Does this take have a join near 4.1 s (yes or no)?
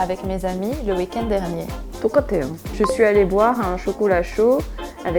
no